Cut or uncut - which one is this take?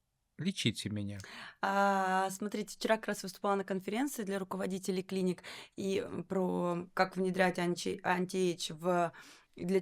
uncut